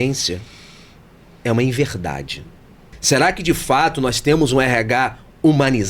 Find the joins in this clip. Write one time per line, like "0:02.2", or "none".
0:02.9